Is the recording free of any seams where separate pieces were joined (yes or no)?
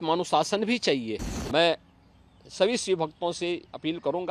no